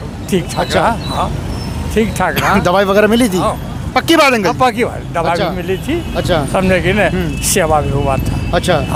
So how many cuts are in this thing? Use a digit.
0